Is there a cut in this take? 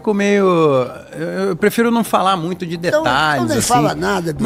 no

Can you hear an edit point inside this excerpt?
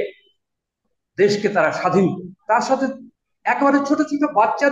yes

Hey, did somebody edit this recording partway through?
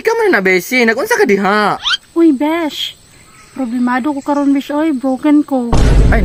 no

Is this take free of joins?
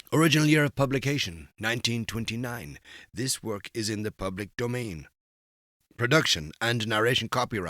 yes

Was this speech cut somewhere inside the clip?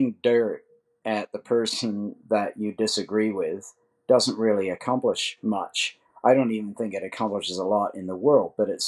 no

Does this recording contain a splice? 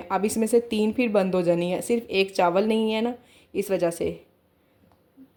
no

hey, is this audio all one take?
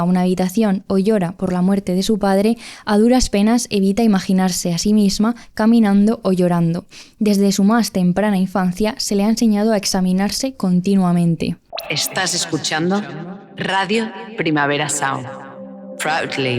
no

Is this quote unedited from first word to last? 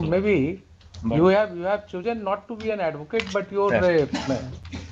yes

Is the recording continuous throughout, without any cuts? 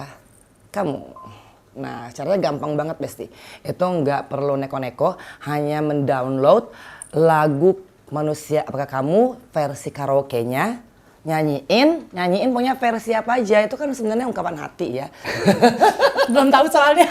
no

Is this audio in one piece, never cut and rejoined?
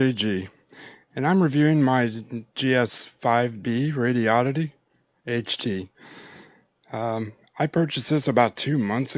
yes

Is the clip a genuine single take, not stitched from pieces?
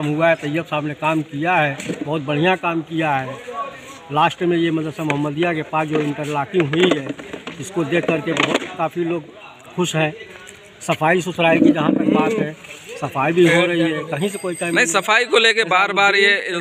yes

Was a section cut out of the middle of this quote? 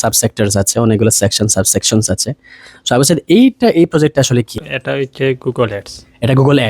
yes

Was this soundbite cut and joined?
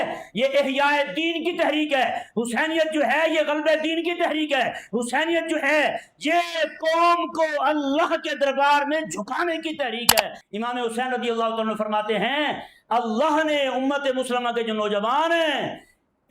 yes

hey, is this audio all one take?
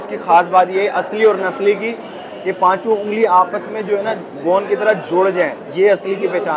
no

